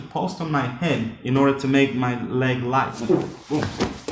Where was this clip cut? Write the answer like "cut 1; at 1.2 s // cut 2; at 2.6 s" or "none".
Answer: cut 1; at 2.9 s